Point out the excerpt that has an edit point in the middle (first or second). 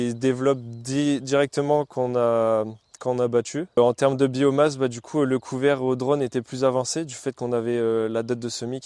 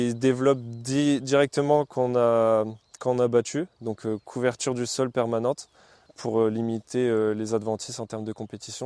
first